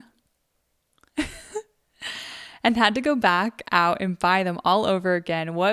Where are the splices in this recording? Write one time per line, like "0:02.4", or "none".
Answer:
none